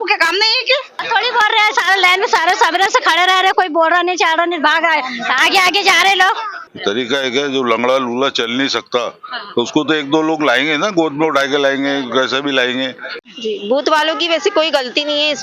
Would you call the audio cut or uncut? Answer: cut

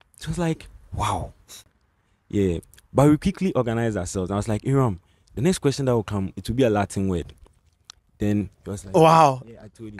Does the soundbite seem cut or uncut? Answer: uncut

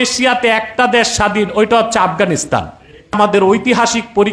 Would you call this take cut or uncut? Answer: cut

